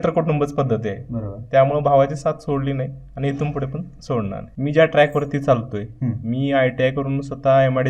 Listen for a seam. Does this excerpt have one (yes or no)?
yes